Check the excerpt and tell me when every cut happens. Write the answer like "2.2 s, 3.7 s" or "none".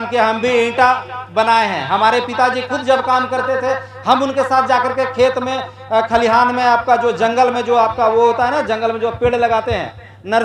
none